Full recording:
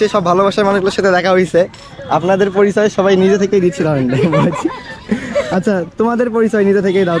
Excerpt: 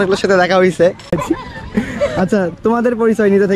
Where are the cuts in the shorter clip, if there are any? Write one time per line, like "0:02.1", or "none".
0:01.2